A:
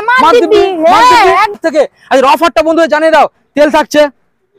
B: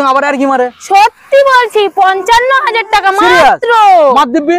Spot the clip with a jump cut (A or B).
A